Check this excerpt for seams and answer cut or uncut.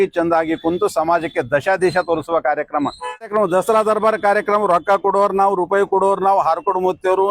cut